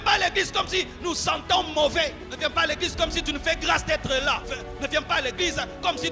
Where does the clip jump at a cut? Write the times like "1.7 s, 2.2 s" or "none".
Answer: 2.2 s, 4.5 s